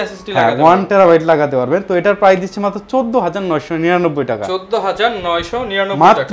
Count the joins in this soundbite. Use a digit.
0